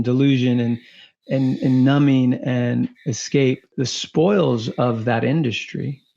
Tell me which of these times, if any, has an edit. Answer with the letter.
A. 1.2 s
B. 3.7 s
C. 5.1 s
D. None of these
B